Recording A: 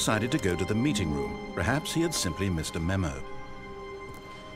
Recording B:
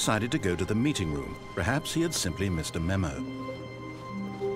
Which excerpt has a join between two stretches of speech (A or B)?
B